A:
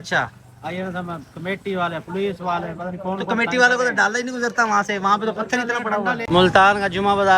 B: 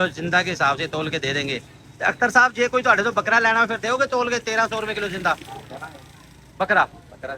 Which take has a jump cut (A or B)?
A